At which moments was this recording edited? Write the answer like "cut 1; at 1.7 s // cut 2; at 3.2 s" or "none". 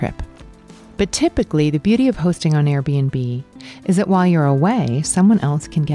none